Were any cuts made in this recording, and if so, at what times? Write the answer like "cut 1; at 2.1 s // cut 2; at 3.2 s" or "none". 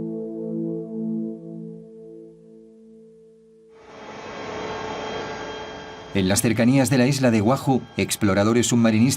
cut 1; at 7.8 s